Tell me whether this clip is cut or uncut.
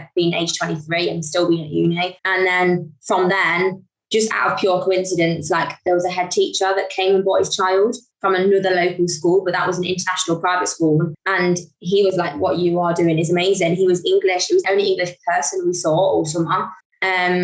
cut